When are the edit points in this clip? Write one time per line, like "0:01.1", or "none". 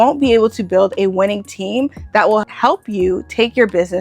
0:02.5